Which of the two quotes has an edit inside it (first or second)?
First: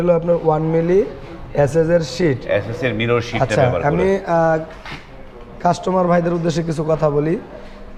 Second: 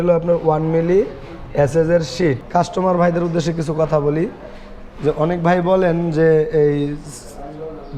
second